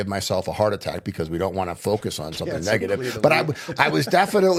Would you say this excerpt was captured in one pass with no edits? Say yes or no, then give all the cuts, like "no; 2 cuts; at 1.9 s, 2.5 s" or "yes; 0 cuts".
yes; 0 cuts